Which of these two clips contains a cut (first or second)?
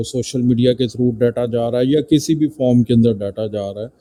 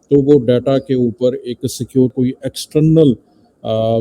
second